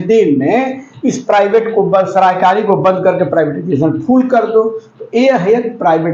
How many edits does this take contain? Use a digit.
0